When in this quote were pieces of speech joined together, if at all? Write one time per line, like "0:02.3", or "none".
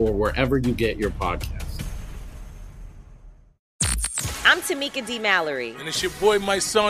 0:03.7